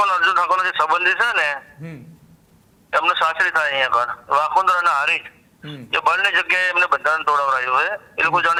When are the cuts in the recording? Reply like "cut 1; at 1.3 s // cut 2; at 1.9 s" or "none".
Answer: none